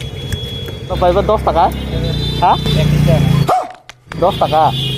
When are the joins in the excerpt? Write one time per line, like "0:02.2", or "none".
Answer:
0:00.9
0:01.9